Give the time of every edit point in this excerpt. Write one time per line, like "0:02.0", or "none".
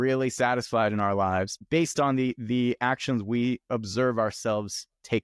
0:01.6